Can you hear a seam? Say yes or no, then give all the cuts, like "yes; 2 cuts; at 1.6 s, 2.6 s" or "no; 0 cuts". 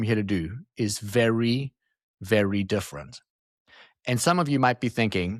no; 0 cuts